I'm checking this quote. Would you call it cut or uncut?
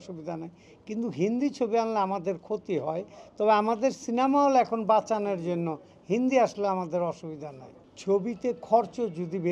cut